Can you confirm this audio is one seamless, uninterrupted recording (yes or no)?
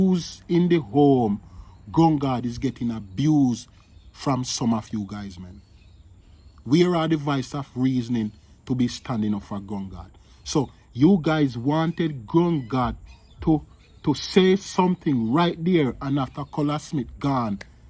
yes